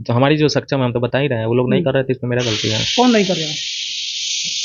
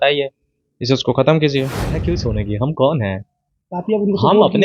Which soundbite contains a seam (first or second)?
second